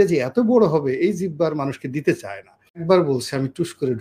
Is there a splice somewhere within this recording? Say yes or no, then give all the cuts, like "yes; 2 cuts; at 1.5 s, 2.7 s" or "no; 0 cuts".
yes; 1 cut; at 2.8 s